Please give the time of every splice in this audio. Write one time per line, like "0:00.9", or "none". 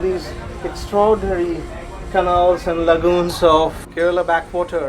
0:03.8